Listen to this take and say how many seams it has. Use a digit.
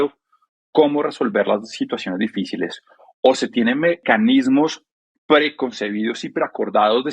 1